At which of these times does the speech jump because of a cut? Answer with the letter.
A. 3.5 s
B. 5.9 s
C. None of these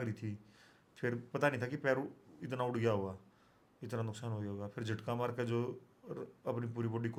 C